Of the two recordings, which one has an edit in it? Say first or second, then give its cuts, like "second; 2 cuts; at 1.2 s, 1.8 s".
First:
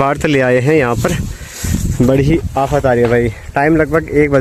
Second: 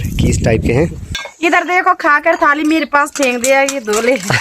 second; 1 cut; at 1.0 s